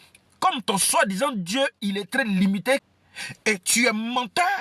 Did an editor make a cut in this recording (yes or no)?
yes